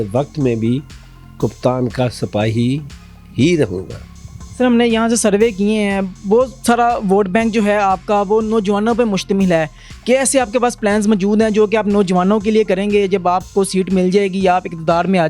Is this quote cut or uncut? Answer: uncut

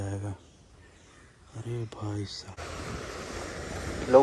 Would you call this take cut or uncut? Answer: cut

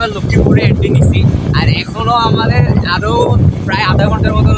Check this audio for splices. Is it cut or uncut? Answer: uncut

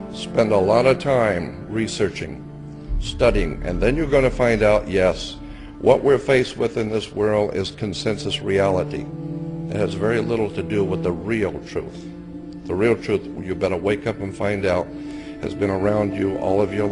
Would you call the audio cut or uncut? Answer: uncut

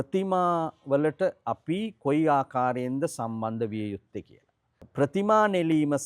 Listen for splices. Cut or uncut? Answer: cut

